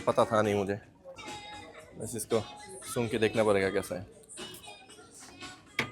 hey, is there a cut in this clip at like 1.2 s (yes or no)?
yes